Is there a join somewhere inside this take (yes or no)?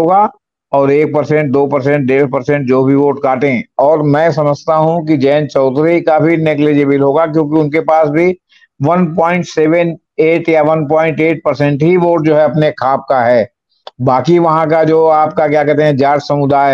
no